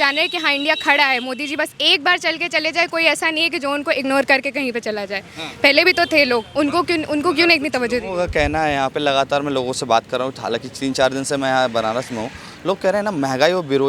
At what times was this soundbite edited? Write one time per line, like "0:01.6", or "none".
none